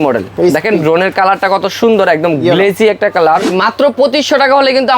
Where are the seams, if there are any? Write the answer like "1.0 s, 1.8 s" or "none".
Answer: 3.6 s